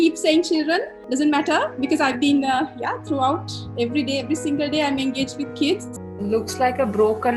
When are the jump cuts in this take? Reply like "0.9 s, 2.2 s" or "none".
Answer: 1.0 s, 6.0 s

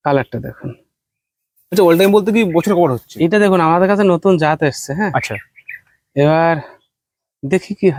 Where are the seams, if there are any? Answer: none

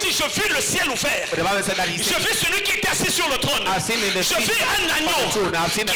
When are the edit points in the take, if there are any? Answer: none

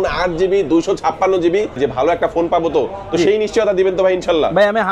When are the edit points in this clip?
1.8 s

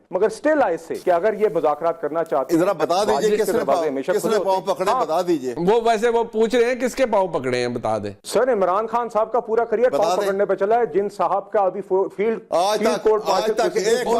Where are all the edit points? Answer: 0.9 s, 8.2 s

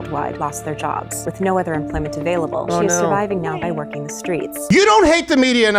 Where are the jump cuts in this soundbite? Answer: 4.6 s

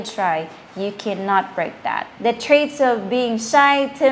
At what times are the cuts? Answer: 2.1 s

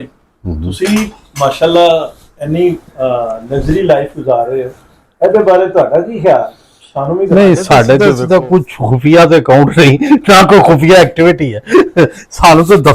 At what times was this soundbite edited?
8.0 s

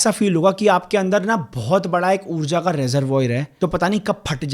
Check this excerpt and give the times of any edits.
3.5 s

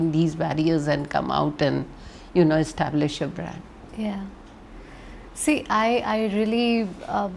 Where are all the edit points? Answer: none

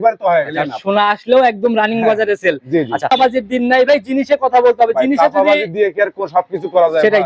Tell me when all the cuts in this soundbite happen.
3.1 s

